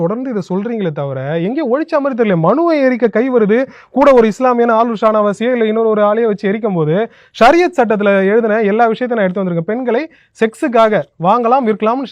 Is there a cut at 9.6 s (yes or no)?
no